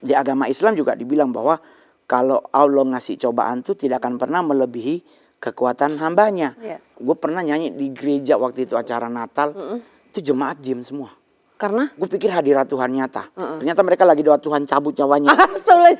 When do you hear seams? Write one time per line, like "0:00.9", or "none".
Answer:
0:06.9